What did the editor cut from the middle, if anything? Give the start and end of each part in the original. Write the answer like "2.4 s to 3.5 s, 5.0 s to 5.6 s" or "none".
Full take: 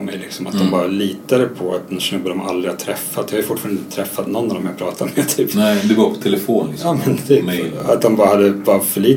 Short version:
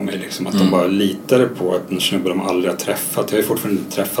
none